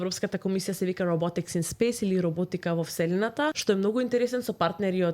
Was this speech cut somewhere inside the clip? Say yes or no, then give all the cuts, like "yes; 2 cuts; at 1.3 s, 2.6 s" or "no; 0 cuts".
yes; 1 cut; at 3.6 s